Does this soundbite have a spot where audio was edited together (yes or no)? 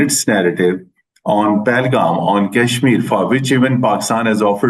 no